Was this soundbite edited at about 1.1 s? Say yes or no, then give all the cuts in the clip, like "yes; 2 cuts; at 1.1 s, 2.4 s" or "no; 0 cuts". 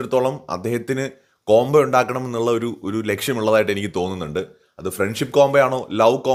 no; 0 cuts